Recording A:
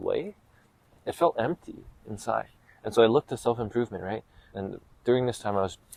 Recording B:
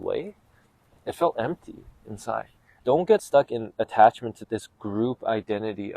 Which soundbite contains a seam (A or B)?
B